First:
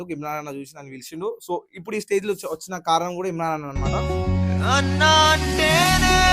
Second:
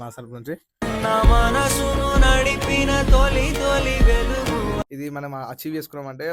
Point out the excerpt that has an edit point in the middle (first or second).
second